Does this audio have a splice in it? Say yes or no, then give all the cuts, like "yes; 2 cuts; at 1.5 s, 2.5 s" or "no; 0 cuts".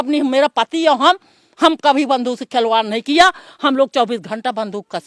no; 0 cuts